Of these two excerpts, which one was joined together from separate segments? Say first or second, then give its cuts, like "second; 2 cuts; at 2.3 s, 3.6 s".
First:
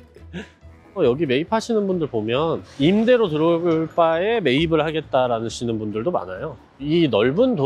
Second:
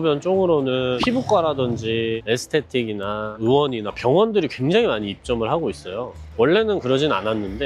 first; 2 cuts; at 1.0 s, 6.8 s